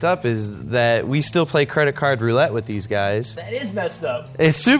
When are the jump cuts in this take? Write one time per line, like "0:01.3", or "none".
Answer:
none